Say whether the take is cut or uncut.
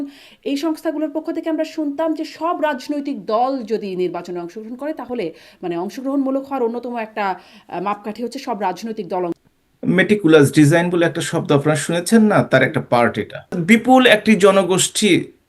cut